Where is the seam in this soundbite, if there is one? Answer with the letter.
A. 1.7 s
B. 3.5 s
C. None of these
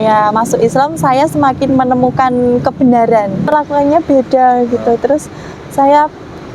B